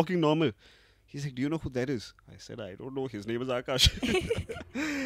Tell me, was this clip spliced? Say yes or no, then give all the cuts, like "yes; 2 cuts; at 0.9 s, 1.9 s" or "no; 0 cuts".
no; 0 cuts